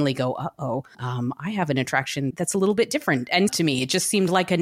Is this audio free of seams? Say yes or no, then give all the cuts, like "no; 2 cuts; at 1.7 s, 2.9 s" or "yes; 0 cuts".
no; 3 cuts; at 1.0 s, 2.3 s, 3.5 s